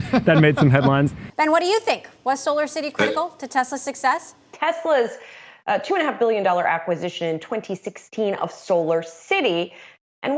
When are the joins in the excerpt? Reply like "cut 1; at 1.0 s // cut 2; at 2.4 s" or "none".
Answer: cut 1; at 1.2 s // cut 2; at 4.4 s